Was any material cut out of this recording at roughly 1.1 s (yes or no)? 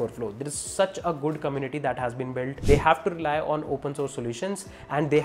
no